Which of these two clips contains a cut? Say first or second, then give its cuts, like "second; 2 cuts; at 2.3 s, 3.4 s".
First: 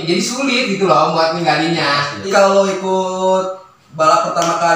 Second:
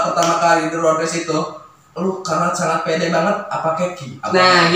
first; 1 cut; at 2.2 s